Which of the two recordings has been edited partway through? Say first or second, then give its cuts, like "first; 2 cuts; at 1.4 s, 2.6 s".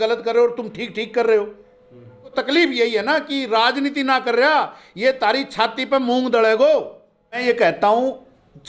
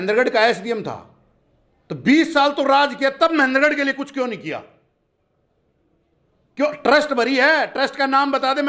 first; 2 cuts; at 2.3 s, 7.4 s